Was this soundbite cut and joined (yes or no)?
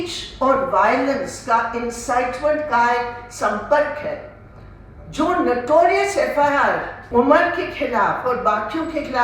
yes